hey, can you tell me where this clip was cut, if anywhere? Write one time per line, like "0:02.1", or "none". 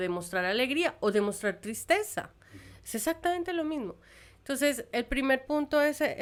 none